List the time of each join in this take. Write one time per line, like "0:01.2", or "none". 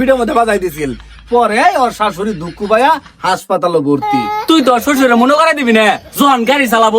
0:04.3